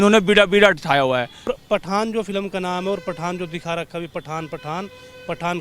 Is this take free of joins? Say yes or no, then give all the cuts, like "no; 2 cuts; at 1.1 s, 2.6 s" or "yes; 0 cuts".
no; 1 cut; at 1.5 s